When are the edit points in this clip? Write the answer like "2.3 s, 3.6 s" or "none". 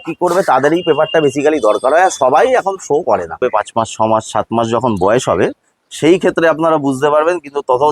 3.4 s